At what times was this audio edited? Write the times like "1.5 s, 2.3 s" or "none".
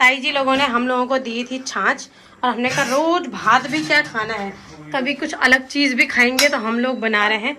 none

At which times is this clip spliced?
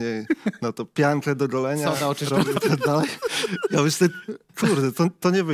none

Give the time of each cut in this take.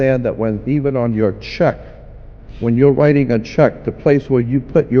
none

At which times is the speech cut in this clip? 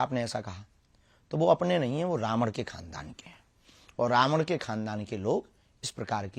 none

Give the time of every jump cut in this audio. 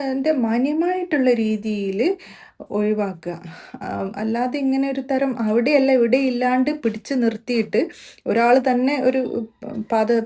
none

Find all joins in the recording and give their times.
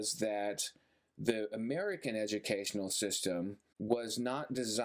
3.7 s

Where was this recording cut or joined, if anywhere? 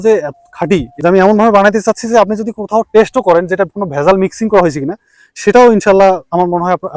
0.9 s

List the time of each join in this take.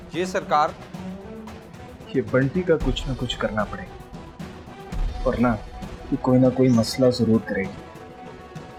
none

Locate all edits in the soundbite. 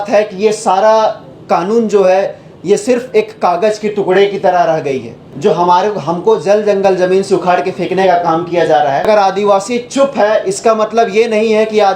5.2 s, 9.1 s

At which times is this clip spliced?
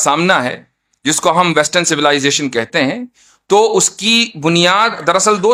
none

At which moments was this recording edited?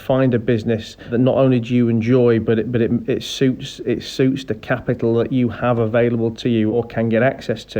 1.1 s, 6.7 s

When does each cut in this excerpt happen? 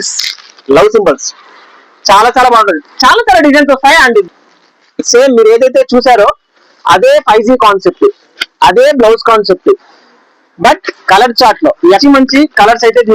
4.3 s, 12.0 s

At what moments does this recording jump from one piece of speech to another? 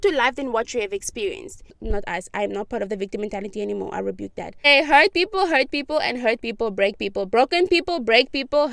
1.7 s, 4.7 s

